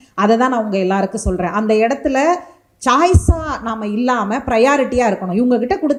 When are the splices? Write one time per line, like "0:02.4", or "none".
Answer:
none